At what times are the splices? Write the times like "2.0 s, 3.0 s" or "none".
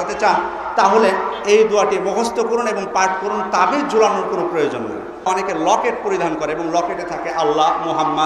5.3 s